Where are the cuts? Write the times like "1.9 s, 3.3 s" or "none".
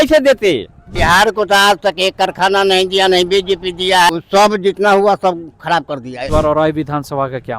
0.9 s, 4.1 s, 6.2 s